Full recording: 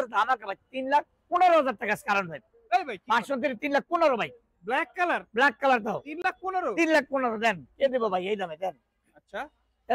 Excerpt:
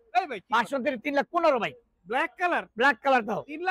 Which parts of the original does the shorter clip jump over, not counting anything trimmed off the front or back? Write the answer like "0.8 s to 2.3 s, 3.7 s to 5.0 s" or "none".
none

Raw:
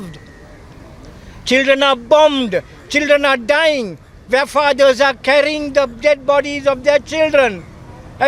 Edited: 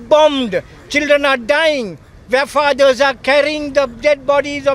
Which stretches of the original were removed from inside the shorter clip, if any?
none

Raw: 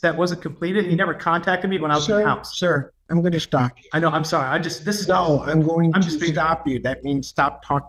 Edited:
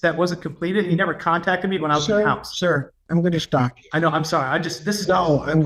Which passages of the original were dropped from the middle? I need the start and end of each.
none

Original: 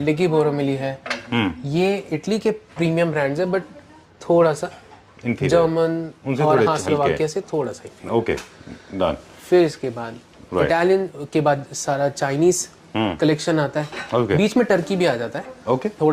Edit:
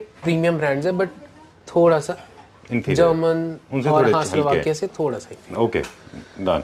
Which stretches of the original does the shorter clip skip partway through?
none

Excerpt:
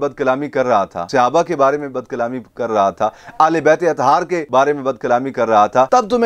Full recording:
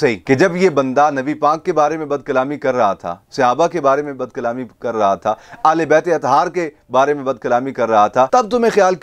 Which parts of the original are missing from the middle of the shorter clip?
3.1 s to 3.2 s, 6.7 s to 6.8 s

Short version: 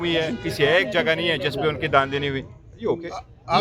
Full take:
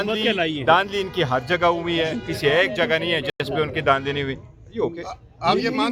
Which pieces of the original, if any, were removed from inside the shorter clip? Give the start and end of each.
3.3 s to 3.4 s

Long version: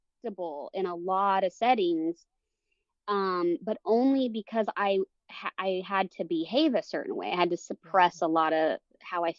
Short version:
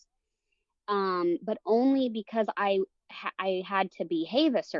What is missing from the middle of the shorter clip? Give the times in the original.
none

